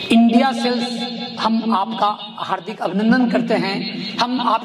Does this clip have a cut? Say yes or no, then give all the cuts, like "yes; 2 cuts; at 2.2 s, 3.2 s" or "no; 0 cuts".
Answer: no; 0 cuts